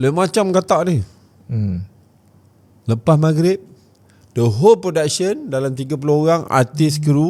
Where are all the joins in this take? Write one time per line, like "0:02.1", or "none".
none